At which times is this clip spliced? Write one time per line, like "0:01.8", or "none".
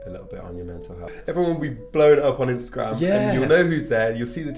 0:01.1